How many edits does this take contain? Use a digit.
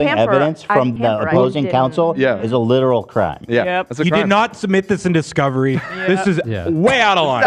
1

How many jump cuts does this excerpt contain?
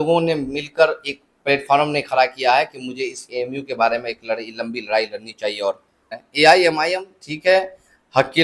1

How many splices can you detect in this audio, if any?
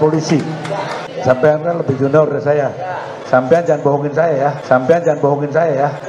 1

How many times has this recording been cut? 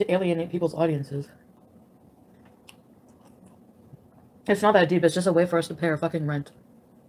0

